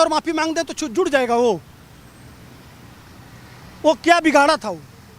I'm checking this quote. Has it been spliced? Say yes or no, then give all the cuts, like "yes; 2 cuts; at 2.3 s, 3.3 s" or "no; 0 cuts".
no; 0 cuts